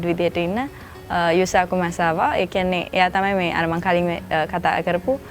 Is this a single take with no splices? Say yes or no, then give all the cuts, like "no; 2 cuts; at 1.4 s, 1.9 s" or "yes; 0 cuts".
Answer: yes; 0 cuts